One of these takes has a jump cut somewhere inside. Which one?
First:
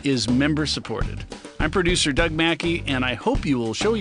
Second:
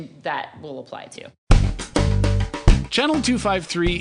second; 1 cut; at 1.3 s

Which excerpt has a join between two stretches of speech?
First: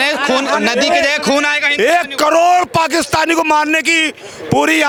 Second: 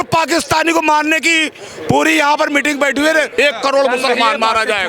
second; 1 cut; at 3.4 s

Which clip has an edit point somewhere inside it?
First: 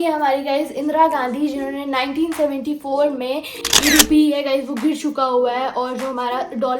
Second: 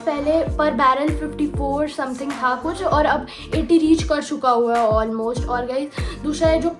first; 1 cut; at 3.6 s

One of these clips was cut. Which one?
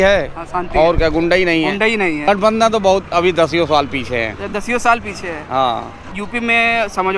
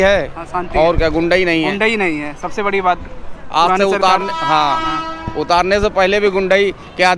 first; 2 cuts; at 2.3 s, 6.0 s

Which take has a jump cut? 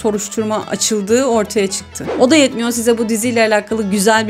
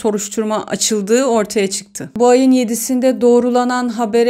first; 1 cut; at 2.0 s

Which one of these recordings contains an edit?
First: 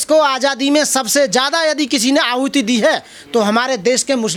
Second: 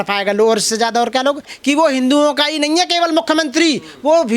second; 1 cut; at 1.4 s

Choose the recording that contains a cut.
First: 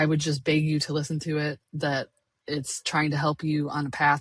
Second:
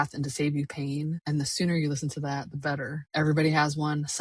second; 2 cuts; at 1.2 s, 3.0 s

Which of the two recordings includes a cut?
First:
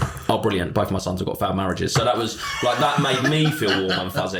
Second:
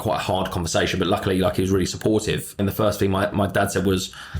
second; 1 cut; at 2.6 s

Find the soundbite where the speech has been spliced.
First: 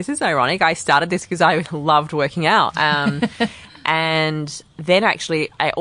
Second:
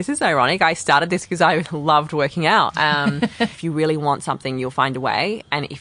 second; 1 cut; at 3.6 s

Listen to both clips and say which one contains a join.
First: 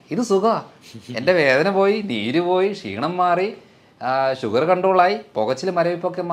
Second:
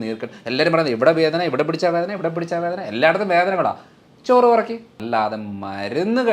second; 1 cut; at 4.9 s

